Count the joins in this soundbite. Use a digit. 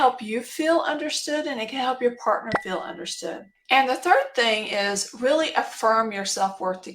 1